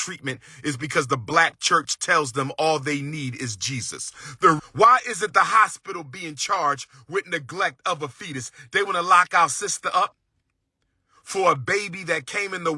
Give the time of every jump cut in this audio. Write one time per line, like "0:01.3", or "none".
0:04.6